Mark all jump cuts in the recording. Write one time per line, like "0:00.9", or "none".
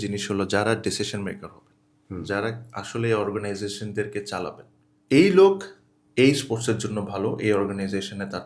none